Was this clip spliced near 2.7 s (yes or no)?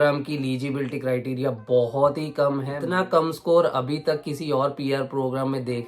yes